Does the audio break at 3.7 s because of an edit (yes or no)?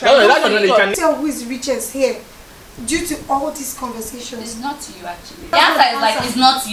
no